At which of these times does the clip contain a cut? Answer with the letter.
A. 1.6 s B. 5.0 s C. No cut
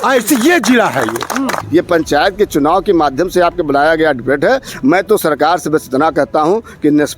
A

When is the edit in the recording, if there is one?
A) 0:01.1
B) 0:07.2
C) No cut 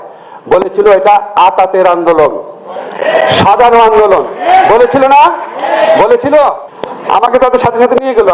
B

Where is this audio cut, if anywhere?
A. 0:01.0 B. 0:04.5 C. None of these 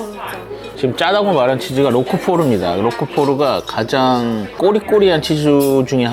B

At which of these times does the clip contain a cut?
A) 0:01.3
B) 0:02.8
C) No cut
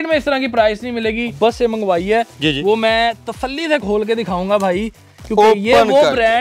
A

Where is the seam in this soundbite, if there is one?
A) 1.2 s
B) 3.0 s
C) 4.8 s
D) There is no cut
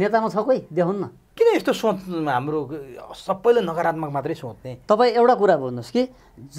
A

